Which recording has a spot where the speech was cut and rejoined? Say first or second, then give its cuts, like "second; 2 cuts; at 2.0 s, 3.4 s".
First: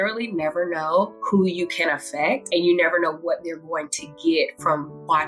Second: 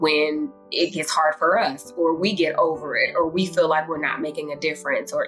first; 2 cuts; at 1.2 s, 2.4 s